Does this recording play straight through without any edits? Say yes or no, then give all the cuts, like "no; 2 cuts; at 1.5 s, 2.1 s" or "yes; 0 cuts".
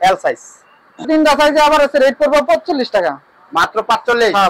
no; 1 cut; at 1.1 s